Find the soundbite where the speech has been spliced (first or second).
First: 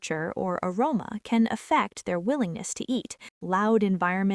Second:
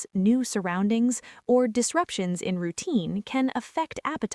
first